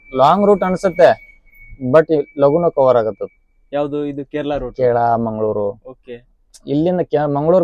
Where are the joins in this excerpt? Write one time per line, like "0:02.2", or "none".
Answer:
none